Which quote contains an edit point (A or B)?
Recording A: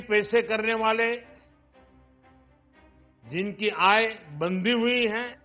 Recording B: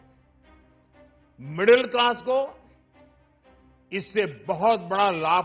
A